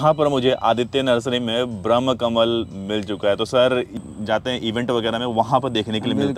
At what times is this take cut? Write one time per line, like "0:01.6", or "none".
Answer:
0:04.0